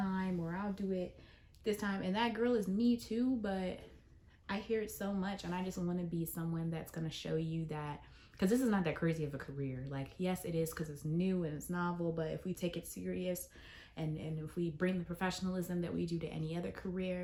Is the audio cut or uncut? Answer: uncut